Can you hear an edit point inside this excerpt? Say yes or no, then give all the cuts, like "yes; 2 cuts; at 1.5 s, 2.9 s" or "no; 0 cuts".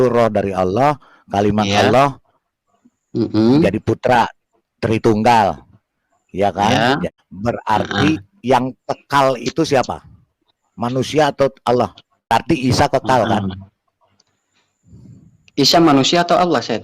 yes; 2 cuts; at 7.1 s, 12.3 s